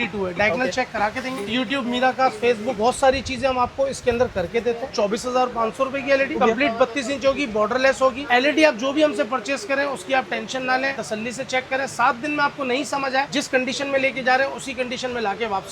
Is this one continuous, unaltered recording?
no; 6 cuts; at 1.5 s, 2.8 s, 4.9 s, 6.4 s, 8.2 s, 11.0 s

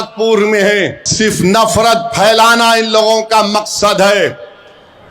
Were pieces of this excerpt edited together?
yes; 1 cut; at 1.0 s

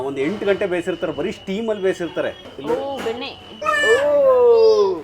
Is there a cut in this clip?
yes; 2 cuts; at 2.5 s, 3.5 s

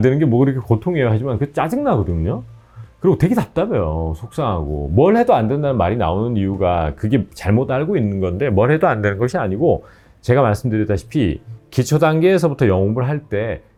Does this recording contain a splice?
no; 0 cuts

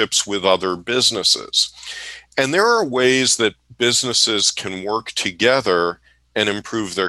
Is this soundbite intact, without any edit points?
yes; 0 cuts

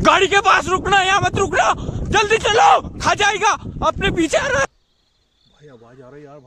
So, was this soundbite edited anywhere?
yes; 1 cut; at 4.7 s

